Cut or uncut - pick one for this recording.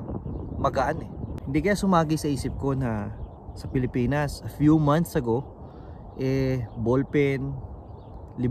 cut